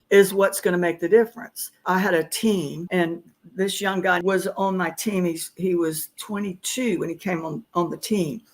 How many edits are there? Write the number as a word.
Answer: three